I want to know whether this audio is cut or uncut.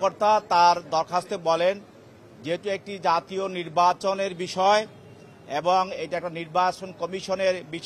uncut